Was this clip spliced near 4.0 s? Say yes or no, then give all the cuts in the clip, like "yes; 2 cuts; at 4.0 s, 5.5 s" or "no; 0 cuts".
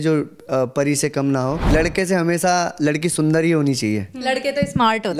no; 1 cut; at 1.7 s